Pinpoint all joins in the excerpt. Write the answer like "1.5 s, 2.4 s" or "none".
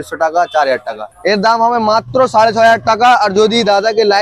1.1 s